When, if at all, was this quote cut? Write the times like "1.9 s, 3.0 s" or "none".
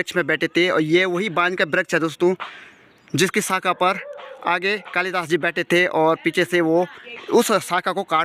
none